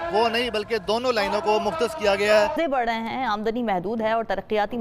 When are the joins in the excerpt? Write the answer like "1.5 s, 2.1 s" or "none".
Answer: 2.5 s